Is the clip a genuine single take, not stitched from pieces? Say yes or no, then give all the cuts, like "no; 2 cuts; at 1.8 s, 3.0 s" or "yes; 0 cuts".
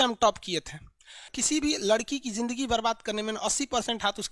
no; 1 cut; at 1.3 s